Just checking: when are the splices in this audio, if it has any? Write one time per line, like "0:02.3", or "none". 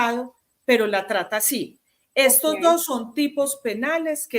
none

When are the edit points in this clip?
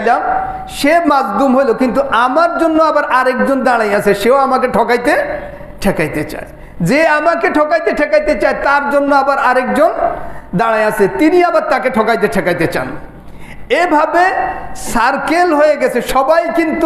none

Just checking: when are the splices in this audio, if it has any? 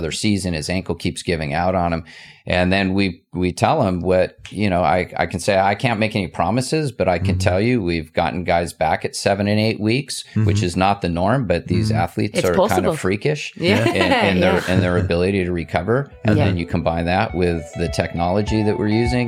none

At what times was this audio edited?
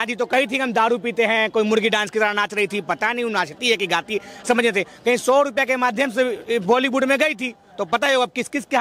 none

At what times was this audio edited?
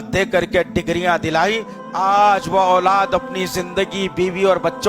0:01.7

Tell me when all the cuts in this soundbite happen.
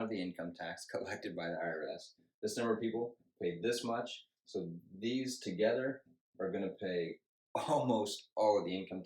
none

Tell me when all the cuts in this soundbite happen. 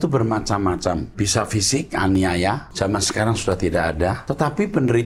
0:01.1
0:02.7
0:04.2

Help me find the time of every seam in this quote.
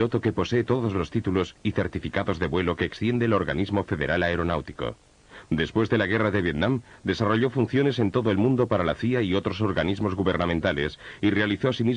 none

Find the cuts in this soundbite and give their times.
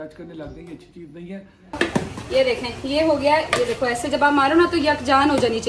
0:01.8

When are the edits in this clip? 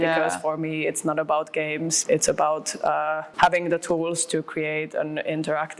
0:02.0
0:03.3

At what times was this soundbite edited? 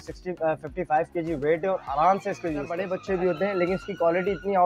0:02.9

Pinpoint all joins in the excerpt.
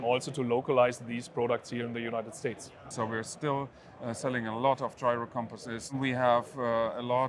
0:02.8
0:05.9

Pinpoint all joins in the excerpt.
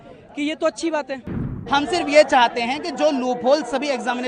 0:01.5

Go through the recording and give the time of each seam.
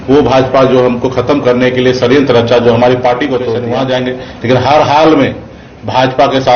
0:03.6

